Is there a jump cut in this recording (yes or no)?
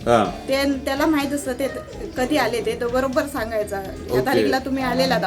no